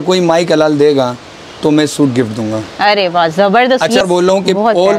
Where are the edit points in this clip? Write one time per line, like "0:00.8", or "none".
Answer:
0:04.0